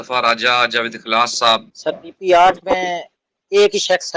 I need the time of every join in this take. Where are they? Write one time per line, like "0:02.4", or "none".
0:01.7